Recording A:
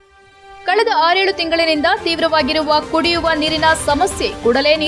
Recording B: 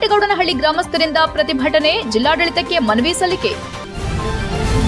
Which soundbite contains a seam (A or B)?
B